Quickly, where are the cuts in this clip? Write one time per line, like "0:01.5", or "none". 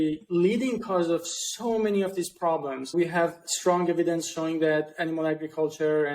0:02.9